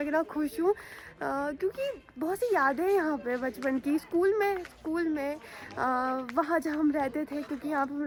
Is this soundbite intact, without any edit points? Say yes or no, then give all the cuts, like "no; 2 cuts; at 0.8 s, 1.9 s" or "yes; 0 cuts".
yes; 0 cuts